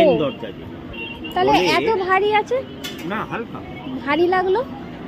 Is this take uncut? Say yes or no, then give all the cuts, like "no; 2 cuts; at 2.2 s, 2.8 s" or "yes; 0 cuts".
yes; 0 cuts